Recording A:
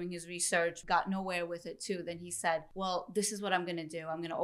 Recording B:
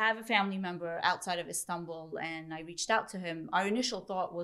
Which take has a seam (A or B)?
A